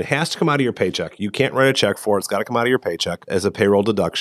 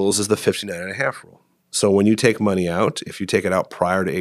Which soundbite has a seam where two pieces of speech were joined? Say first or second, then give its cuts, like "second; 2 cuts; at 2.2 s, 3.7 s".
first; 1 cut; at 3.2 s